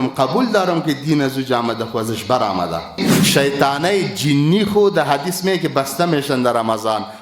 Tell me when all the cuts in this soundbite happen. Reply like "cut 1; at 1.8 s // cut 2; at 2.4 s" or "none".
cut 1; at 3.1 s